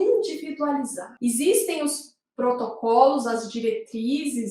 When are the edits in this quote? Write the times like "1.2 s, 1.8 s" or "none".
1.1 s